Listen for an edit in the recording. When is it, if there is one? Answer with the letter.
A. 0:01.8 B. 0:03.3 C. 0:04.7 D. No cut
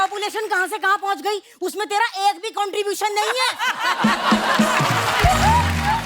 D